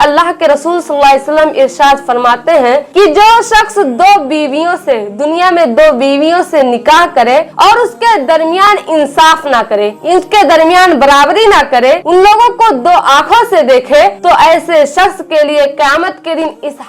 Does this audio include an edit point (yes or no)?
no